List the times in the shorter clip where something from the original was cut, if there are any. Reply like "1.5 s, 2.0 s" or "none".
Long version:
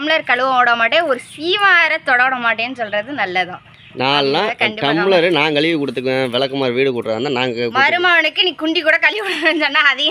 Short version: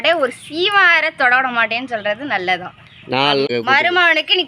3.5 s

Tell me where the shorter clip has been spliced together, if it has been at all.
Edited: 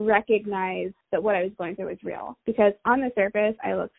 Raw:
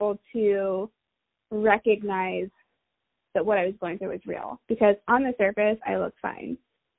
1.0 s

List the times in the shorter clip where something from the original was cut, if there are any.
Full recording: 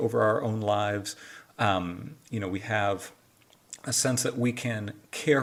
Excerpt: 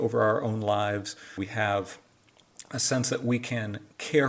1.4 s

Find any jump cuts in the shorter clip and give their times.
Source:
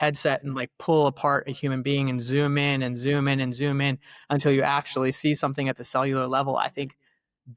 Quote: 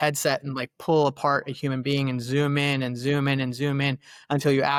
none

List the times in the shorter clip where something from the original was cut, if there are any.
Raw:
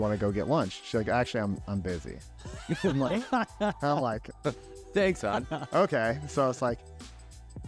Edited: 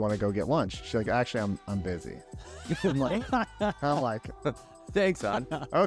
none

